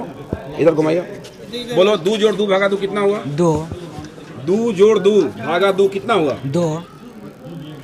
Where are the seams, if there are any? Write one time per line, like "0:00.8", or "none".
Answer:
none